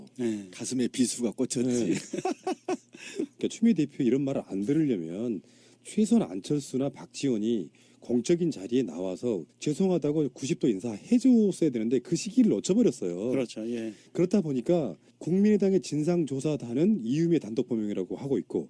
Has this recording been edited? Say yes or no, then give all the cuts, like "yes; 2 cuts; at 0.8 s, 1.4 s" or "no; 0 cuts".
no; 0 cuts